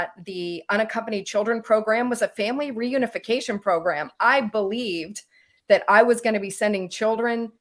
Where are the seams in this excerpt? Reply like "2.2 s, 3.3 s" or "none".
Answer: none